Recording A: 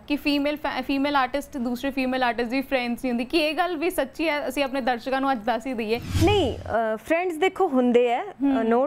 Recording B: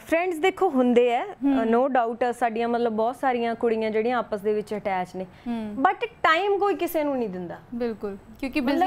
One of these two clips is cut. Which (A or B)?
A